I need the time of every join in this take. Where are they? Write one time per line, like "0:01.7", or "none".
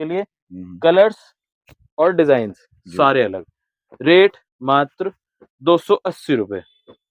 none